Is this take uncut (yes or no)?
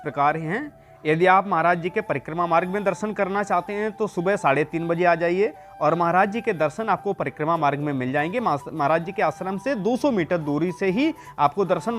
yes